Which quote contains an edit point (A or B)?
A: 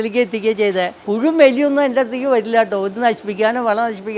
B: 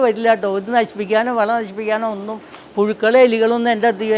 A